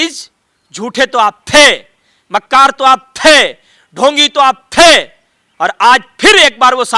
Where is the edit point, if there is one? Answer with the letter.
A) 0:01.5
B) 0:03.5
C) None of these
C